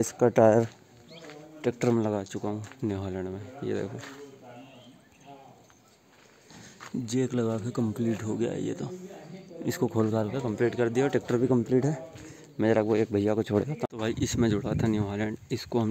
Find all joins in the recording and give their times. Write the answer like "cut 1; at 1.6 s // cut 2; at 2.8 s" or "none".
cut 1; at 13.8 s